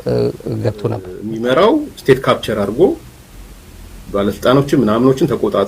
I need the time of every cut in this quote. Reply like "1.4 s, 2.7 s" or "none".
1.2 s